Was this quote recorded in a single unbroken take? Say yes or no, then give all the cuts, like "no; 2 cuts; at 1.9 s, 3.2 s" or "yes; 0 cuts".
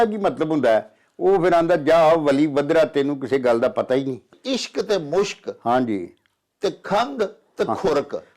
no; 1 cut; at 4.3 s